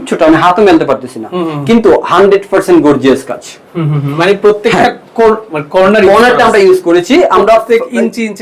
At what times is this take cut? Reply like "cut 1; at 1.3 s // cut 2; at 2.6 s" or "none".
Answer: none

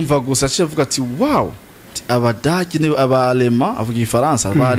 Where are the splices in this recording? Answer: none

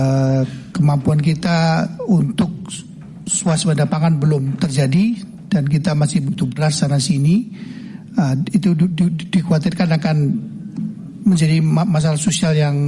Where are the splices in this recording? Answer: none

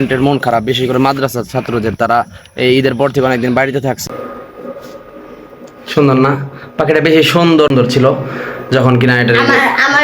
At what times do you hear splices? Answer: cut 1; at 4.0 s // cut 2; at 7.7 s

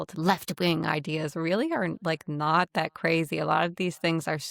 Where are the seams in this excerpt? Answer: none

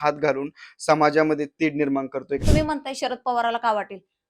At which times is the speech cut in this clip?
cut 1; at 2.4 s

